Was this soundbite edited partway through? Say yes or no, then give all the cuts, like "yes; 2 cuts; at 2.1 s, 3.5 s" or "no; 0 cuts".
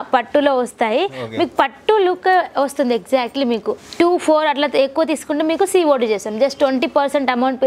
yes; 1 cut; at 3.7 s